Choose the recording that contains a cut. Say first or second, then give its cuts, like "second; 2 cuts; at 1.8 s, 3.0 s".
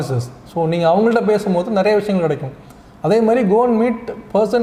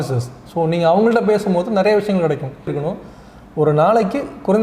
second; 1 cut; at 2.8 s